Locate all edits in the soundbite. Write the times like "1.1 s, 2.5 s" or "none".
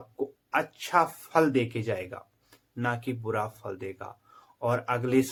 none